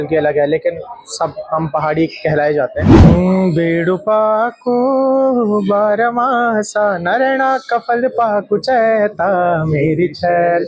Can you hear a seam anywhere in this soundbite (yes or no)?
yes